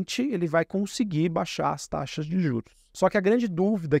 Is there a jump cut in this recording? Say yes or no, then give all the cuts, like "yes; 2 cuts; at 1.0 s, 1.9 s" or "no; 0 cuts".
yes; 1 cut; at 2.8 s